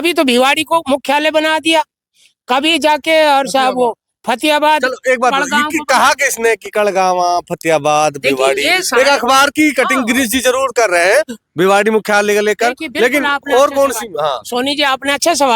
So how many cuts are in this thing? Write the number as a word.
zero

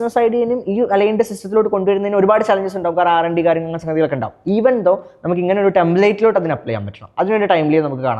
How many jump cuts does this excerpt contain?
zero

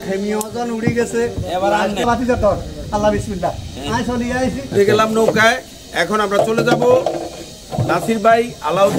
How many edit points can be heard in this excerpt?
two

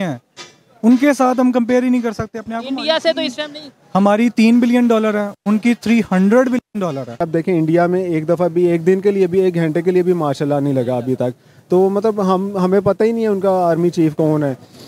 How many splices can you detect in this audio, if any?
one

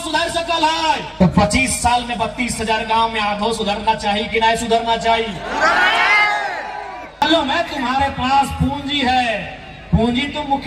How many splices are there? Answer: two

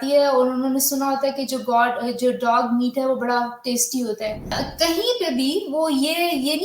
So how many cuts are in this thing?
one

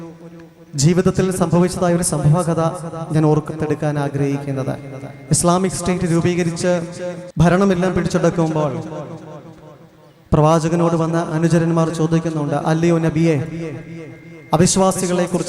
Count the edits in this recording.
one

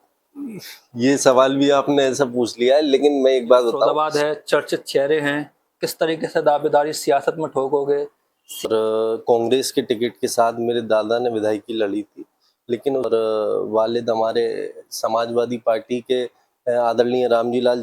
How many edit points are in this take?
three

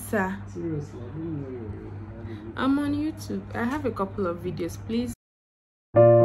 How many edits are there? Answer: one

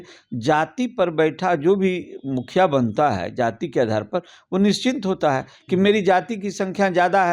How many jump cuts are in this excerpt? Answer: zero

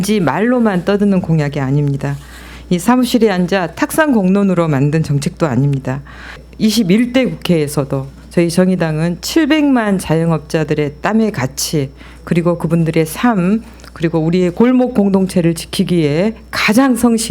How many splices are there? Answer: two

